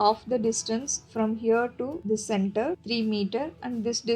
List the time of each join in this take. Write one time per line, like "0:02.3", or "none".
0:02.0
0:02.8